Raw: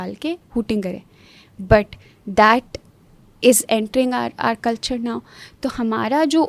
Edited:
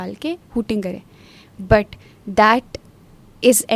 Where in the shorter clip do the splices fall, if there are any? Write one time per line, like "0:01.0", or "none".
none

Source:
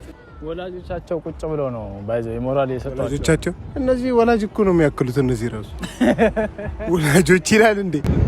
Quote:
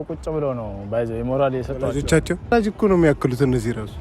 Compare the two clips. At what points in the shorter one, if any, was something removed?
0:02.5

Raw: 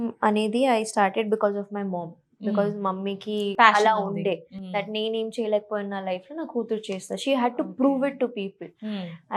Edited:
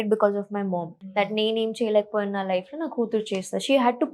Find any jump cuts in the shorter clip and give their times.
0:01.0

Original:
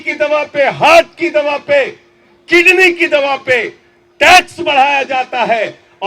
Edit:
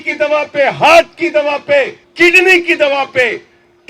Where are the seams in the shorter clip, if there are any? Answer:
0:02.0

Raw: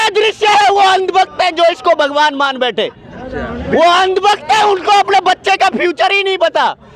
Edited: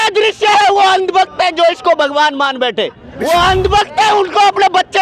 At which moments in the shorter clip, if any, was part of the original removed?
0:03.1

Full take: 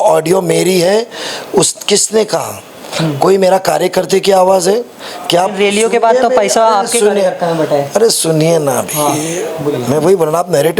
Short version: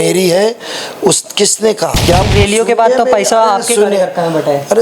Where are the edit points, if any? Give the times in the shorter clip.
0:02.0

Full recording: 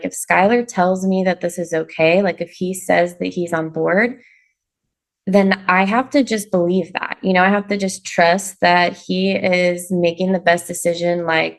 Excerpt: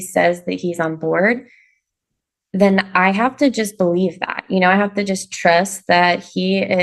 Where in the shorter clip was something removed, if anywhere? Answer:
none

